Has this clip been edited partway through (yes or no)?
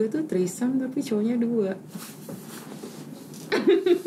no